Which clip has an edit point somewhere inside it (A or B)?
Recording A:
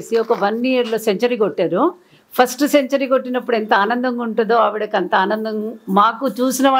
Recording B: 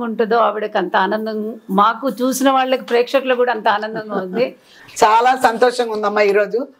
B